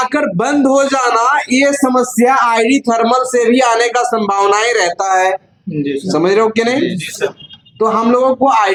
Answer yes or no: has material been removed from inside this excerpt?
no